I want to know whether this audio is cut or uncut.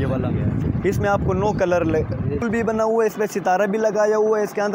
cut